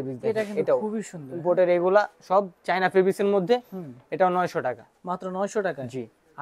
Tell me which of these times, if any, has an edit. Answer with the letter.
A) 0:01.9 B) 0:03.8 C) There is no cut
C